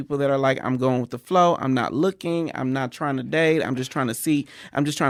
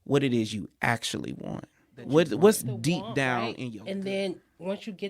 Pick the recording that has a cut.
second; 1 cut; at 3.5 s

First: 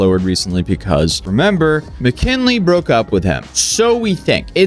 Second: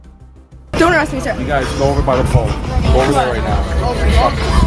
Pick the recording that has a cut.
first; 1 cut; at 1.2 s

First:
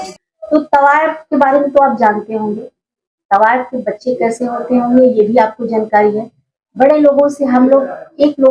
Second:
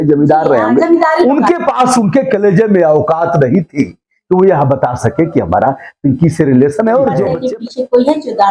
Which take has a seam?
second; 1 cut; at 7.3 s

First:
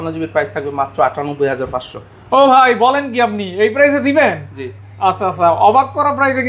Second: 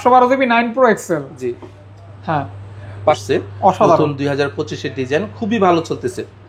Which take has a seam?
second; 1 cut; at 3.2 s

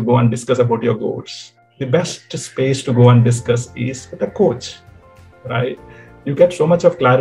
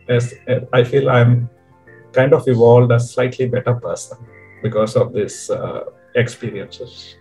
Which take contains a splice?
first; 1 cut; at 1.6 s

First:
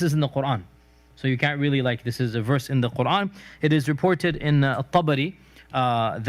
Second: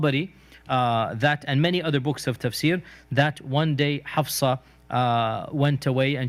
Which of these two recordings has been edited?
first; 1 cut; at 2.0 s

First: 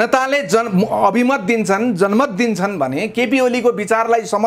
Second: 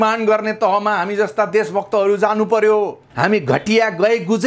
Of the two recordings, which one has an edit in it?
second; 1 cut; at 3.0 s

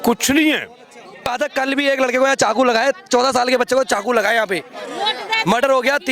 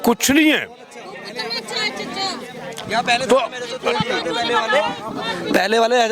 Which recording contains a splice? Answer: first; 1 cut; at 1.3 s

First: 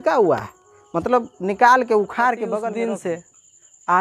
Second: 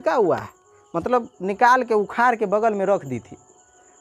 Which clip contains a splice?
first; 1 cut; at 2.6 s

